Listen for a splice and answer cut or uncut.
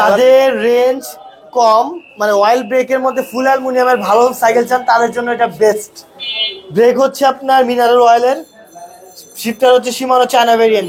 uncut